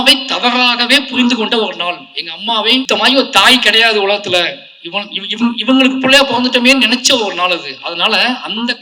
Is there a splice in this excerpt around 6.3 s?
no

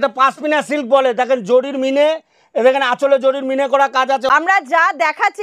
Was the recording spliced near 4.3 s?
yes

